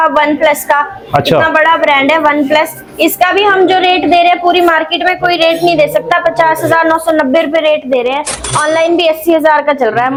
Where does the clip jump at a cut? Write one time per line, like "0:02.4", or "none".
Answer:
none